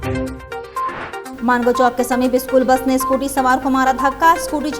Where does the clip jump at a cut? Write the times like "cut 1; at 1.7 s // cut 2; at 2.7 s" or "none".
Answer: cut 1; at 1.2 s